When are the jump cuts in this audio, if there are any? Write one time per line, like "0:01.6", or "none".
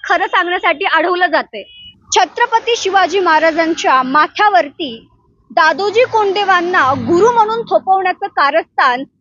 0:02.0